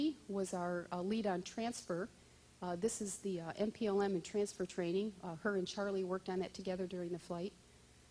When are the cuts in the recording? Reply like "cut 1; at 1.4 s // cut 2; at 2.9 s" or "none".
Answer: cut 1; at 2.7 s